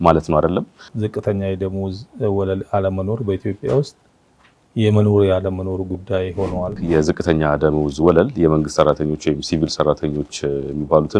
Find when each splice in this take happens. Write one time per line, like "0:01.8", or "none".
0:01.0
0:06.8